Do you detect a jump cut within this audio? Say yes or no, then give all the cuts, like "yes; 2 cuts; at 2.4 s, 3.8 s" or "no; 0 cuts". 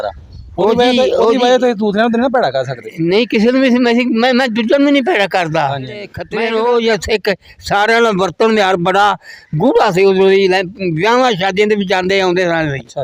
yes; 1 cut; at 6.2 s